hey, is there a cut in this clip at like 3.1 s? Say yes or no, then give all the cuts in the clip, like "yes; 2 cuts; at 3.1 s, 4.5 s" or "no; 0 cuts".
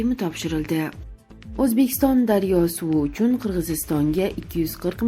no; 1 cut; at 1.0 s